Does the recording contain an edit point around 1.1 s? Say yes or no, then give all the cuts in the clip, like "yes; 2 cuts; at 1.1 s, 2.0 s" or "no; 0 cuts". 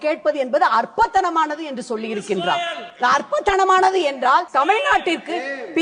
no; 2 cuts; at 2.8 s, 4.5 s